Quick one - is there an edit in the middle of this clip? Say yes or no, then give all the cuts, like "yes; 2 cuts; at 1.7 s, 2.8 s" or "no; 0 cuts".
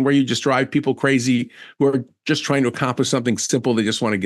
no; 0 cuts